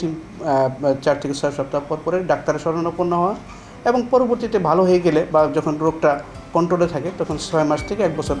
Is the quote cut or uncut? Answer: uncut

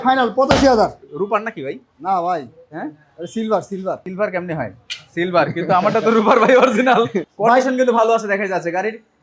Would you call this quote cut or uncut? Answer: cut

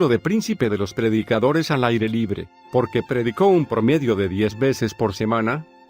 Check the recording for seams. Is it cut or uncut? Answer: cut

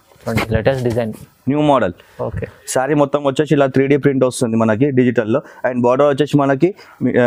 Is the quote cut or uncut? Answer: uncut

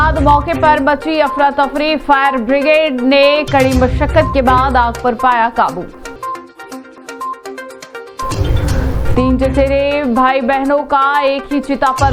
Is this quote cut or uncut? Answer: uncut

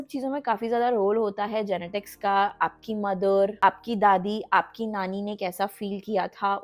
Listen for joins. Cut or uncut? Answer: uncut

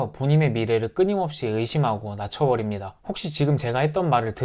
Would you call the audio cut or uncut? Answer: cut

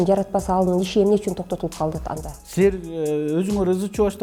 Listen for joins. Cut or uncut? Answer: uncut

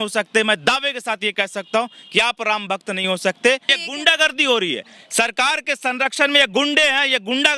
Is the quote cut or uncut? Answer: cut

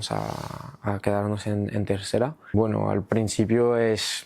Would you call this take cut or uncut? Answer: cut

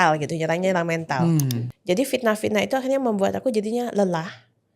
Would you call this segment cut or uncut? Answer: cut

